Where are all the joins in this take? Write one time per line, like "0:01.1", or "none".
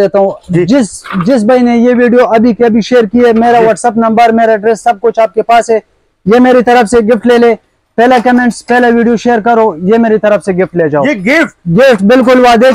none